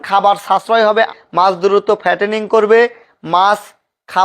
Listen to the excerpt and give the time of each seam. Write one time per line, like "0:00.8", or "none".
0:01.1